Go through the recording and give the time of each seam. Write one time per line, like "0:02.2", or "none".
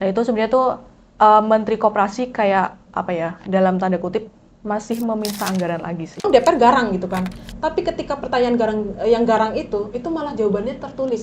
0:06.2